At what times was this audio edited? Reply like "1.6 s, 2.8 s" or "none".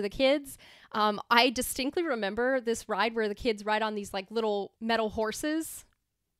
4.7 s